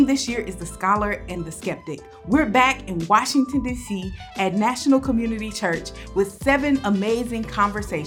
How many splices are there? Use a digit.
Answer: 0